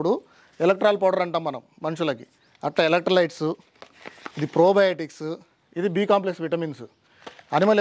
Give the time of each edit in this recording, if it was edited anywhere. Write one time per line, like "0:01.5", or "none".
none